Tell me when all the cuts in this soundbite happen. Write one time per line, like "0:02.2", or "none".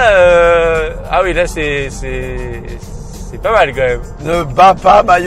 none